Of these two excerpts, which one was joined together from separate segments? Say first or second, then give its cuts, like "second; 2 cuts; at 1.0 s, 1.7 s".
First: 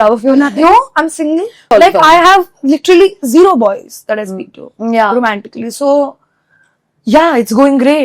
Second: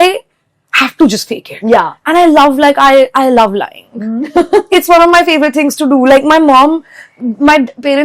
first; 1 cut; at 1.7 s